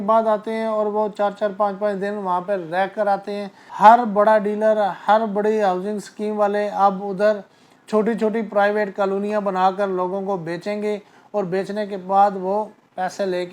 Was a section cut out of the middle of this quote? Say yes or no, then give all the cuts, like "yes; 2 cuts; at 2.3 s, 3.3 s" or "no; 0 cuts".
yes; 1 cut; at 3.6 s